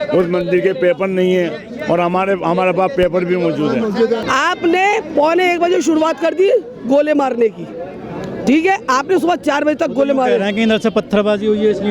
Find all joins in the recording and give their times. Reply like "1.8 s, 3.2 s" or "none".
4.2 s